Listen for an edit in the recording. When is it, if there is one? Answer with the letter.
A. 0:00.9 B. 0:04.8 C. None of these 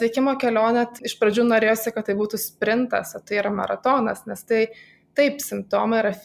A